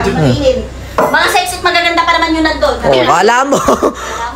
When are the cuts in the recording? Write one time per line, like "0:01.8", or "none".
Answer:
none